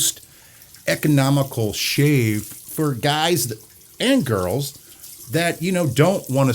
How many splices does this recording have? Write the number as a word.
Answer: one